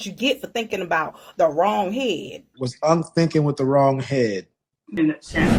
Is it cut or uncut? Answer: uncut